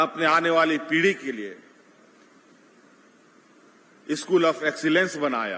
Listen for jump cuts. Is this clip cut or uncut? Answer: uncut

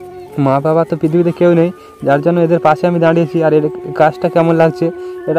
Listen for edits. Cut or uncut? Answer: uncut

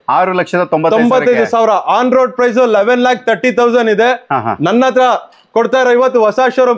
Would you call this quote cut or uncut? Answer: uncut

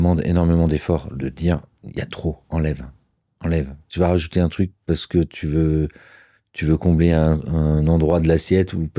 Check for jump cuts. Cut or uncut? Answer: cut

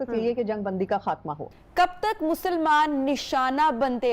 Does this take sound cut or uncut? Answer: cut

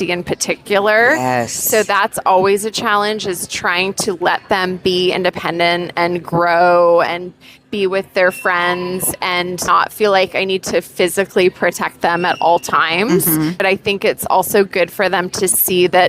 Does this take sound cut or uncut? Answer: cut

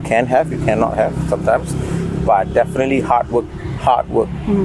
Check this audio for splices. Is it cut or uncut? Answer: uncut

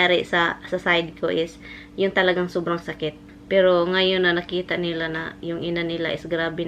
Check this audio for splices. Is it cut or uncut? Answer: cut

